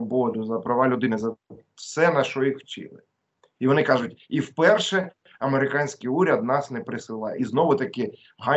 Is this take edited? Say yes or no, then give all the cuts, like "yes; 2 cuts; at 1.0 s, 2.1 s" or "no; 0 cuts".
no; 0 cuts